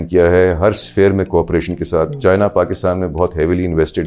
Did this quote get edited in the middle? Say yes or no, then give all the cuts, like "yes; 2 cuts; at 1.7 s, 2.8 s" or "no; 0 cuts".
no; 0 cuts